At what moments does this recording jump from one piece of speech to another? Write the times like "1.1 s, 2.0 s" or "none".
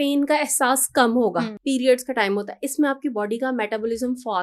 1.5 s